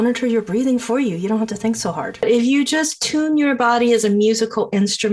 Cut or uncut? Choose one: cut